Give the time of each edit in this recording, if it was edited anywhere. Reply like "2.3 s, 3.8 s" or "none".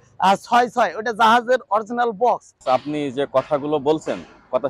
2.6 s